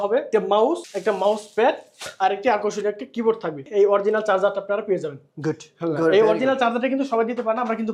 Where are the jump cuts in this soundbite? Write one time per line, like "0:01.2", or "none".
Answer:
none